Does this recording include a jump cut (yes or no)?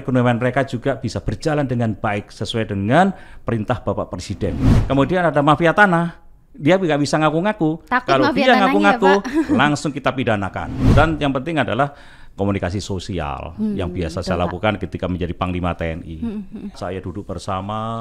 yes